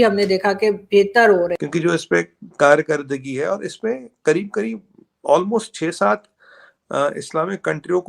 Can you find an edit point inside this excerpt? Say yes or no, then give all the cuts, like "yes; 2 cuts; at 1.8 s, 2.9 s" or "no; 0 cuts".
yes; 1 cut; at 1.6 s